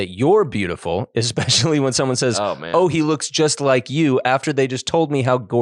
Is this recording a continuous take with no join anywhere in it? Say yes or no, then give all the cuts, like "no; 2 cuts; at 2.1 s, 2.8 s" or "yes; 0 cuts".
yes; 0 cuts